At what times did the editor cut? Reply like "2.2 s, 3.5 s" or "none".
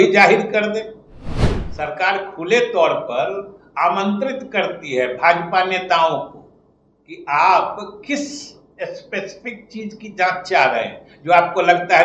none